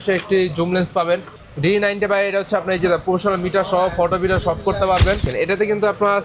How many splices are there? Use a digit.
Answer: 2